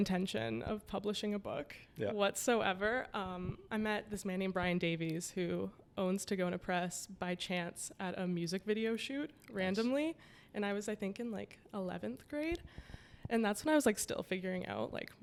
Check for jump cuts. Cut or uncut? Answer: uncut